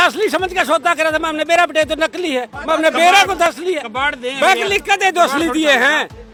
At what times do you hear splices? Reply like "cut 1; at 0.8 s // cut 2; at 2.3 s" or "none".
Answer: none